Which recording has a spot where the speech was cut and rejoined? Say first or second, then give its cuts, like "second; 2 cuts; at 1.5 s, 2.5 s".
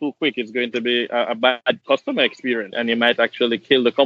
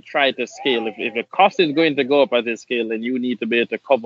first; 2 cuts; at 1.7 s, 2.7 s